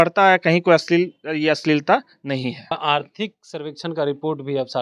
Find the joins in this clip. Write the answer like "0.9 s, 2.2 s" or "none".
2.7 s